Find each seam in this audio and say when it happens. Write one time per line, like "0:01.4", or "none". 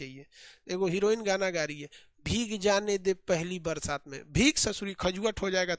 none